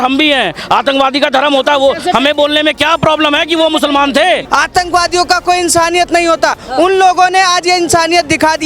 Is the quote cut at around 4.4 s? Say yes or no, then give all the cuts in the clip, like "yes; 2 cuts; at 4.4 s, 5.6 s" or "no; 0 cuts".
yes; 1 cut; at 4.4 s